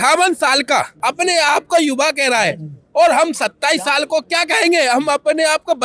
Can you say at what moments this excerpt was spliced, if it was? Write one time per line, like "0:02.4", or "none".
0:00.9